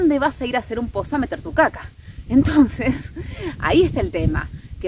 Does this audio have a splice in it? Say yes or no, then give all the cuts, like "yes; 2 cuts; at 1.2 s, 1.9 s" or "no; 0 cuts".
no; 0 cuts